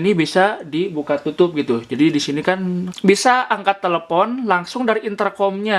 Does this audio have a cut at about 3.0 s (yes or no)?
yes